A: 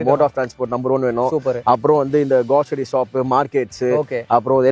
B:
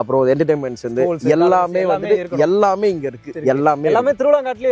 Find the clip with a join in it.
B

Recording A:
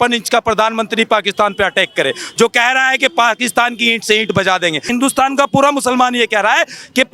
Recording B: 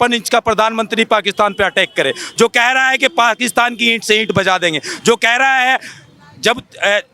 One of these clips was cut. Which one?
A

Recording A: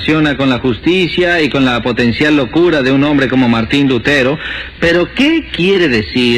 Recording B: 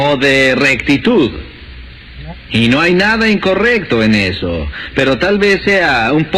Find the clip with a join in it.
B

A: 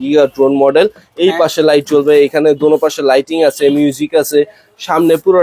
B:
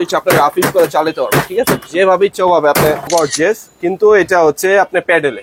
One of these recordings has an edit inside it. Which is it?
B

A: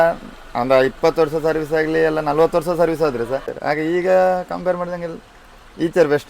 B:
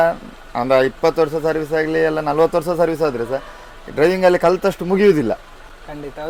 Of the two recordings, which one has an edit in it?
A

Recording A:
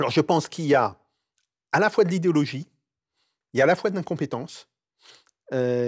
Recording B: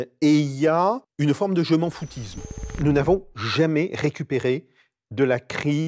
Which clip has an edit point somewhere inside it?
B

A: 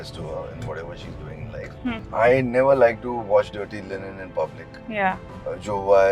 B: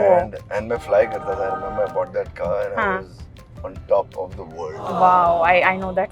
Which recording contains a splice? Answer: A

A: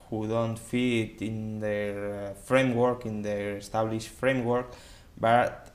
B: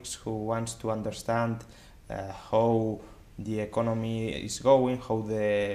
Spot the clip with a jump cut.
A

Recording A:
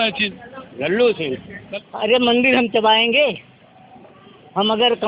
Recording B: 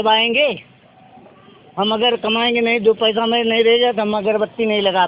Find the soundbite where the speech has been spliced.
A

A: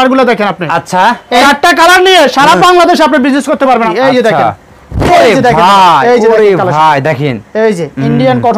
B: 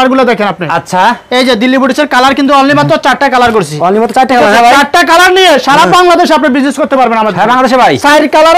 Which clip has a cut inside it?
A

